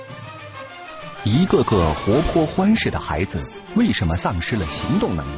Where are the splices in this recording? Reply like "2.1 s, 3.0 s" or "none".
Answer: 1.2 s